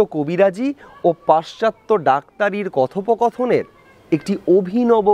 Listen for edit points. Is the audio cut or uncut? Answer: uncut